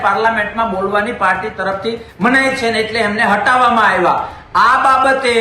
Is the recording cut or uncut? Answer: uncut